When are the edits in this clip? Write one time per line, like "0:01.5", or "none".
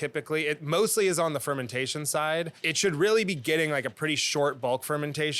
0:02.6